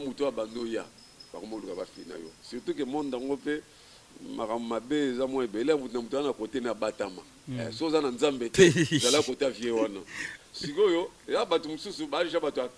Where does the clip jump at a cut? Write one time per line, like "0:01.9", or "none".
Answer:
none